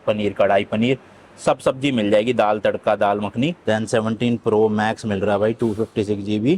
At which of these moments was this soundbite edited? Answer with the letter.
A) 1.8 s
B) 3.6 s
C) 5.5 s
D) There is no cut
B